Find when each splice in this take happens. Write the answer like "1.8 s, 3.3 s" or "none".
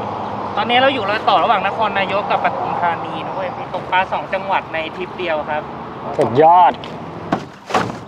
3.6 s, 7.2 s